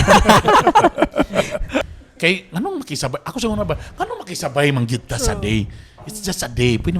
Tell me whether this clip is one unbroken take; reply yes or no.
no